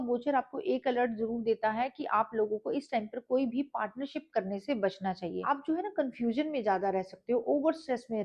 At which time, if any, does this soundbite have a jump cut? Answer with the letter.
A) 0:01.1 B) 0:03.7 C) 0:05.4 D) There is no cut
C